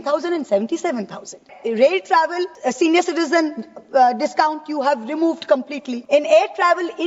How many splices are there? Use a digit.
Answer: 3